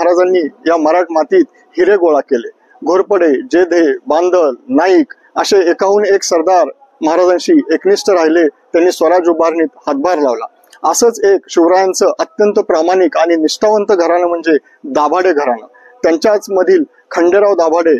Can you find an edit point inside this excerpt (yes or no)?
no